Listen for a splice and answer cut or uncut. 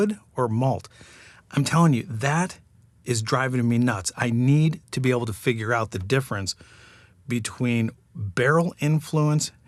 uncut